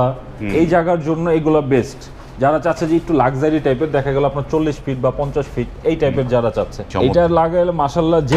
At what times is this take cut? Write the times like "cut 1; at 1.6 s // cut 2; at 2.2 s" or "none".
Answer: cut 1; at 6.8 s